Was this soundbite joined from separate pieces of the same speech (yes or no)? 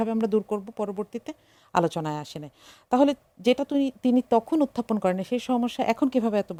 no